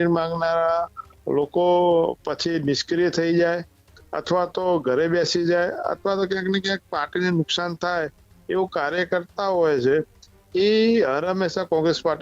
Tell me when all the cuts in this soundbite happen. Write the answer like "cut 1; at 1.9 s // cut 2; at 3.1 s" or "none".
none

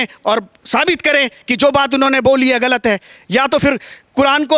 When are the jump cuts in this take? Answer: none

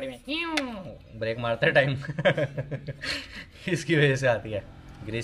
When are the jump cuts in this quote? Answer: none

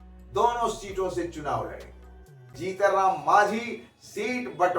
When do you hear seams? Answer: cut 1; at 2.6 s

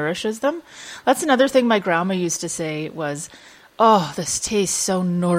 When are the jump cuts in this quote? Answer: none

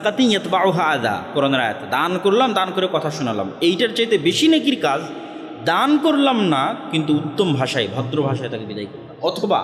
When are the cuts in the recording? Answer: none

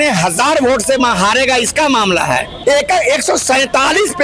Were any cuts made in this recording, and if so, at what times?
cut 1; at 2.5 s

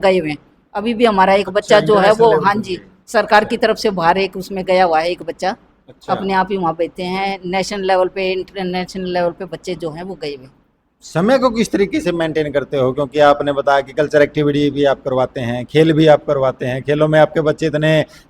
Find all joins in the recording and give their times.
none

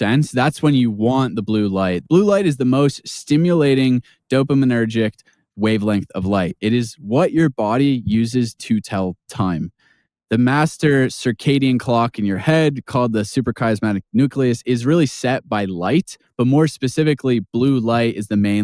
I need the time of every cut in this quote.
cut 1; at 2.0 s

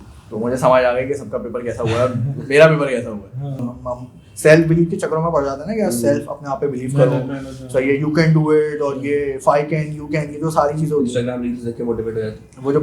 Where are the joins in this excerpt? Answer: cut 1; at 3.7 s

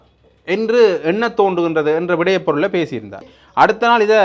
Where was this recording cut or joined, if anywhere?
cut 1; at 3.2 s

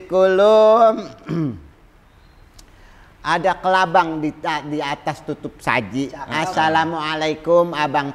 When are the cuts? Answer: none

